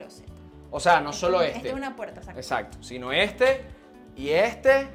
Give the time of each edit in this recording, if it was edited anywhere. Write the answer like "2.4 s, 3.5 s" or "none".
none